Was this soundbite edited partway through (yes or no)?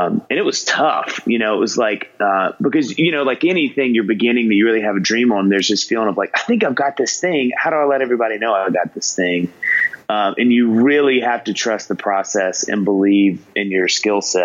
no